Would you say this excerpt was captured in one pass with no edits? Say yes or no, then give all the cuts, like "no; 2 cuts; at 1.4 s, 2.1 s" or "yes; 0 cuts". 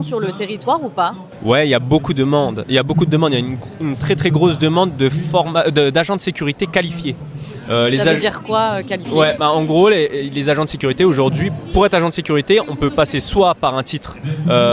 yes; 0 cuts